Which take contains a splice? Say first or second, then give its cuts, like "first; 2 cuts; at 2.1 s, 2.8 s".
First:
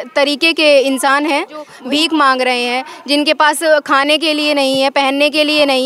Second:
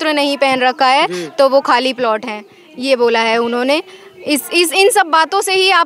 first; 1 cut; at 1.7 s